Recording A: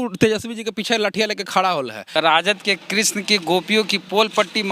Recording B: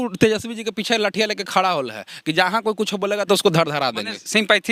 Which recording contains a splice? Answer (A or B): A